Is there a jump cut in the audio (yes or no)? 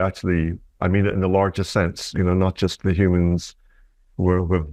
no